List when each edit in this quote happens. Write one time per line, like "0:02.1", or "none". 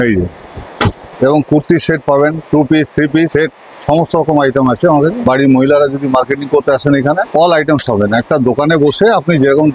0:01.1
0:05.2